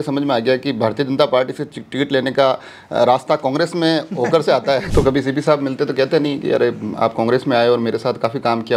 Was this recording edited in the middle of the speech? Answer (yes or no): yes